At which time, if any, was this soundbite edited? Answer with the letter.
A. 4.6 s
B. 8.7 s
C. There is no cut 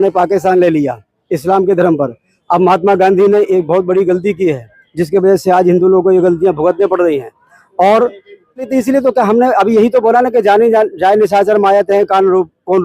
B